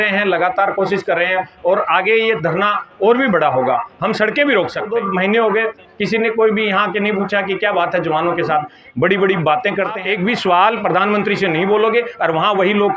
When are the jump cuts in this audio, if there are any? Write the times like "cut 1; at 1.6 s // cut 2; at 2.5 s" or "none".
cut 1; at 4.9 s // cut 2; at 10.0 s